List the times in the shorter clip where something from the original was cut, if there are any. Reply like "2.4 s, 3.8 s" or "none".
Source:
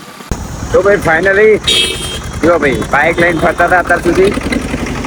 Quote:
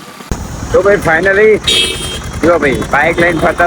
none

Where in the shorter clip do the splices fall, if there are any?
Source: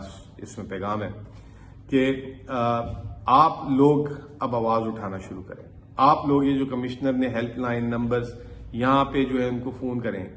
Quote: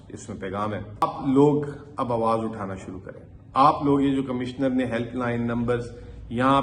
1.0 s

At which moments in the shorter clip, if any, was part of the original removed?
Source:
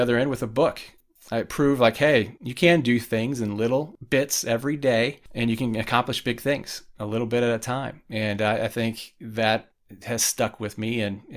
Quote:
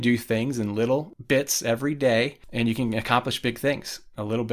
none

